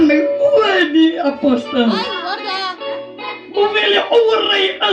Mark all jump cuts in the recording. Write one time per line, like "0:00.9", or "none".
none

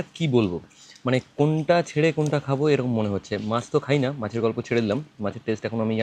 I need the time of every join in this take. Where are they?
none

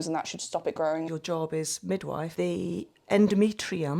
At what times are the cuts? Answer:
0:01.1
0:02.3

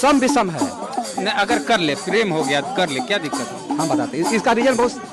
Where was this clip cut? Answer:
none

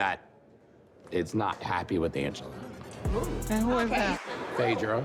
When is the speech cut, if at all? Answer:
0:04.2

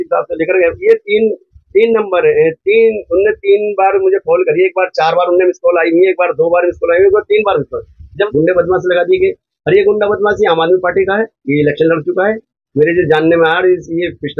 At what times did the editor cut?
0:08.3

